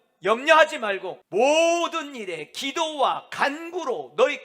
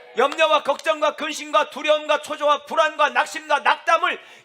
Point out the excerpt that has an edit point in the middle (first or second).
first